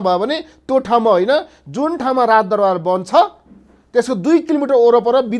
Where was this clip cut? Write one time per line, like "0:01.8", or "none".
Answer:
none